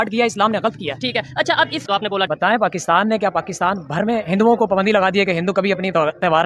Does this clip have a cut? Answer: yes; 1 cut; at 1.8 s

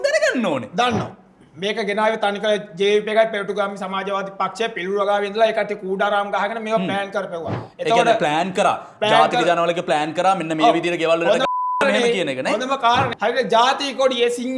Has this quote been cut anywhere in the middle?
yes; 1 cut; at 13.1 s

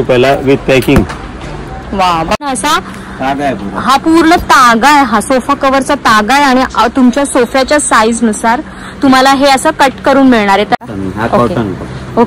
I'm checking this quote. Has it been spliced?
yes; 2 cuts; at 2.4 s, 10.8 s

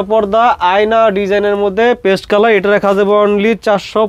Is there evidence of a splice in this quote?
no; 0 cuts

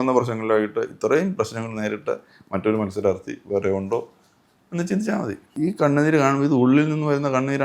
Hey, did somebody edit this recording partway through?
yes; 1 cut; at 5.5 s

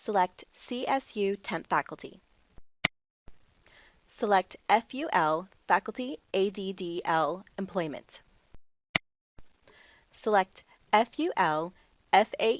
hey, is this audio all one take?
yes; 0 cuts

